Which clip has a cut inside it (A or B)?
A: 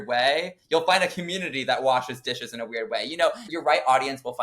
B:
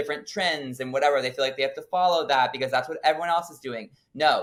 A